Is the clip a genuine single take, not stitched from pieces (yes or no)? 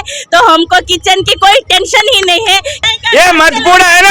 no